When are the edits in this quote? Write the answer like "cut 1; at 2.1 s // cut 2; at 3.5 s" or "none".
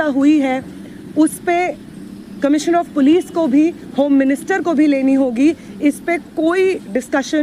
none